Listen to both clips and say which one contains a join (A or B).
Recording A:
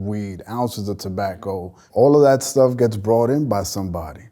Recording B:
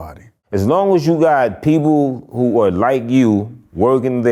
A